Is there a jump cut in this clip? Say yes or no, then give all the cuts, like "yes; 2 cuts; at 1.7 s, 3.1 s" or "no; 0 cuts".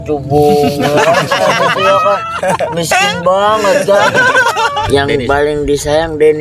yes; 1 cut; at 4.8 s